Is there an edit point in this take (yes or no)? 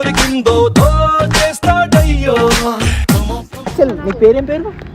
yes